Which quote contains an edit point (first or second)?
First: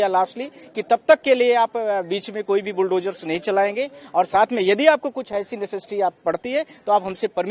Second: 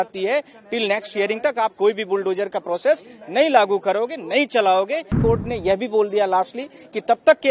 second